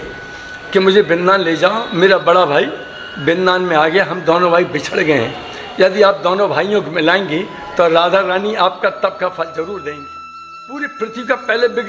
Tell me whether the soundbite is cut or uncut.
cut